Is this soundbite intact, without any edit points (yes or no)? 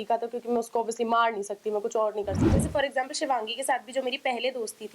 no